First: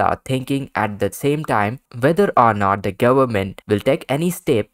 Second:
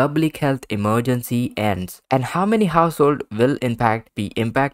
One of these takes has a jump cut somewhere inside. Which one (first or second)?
second